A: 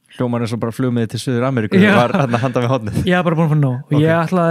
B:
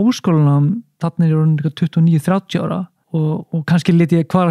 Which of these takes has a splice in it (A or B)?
B